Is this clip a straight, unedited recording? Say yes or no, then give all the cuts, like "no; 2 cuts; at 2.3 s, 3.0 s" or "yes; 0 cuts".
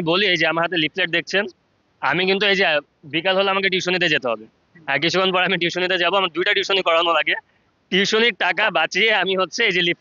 yes; 0 cuts